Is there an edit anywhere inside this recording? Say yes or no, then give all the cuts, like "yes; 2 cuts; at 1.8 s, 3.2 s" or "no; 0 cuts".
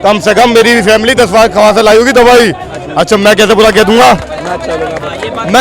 no; 0 cuts